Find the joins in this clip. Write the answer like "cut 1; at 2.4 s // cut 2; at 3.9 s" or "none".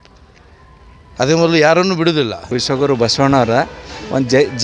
cut 1; at 2.6 s